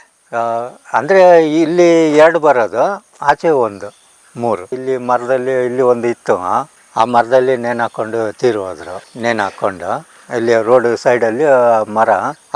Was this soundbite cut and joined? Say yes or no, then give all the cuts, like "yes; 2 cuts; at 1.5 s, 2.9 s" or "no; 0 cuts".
no; 0 cuts